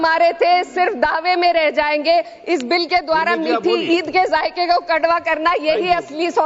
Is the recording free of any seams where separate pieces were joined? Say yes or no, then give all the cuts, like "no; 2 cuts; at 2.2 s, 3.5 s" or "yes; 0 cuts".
yes; 0 cuts